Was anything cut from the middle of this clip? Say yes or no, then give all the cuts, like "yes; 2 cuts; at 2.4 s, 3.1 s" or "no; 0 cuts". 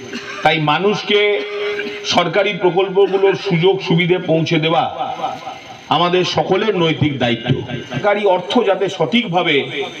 yes; 1 cut; at 8.0 s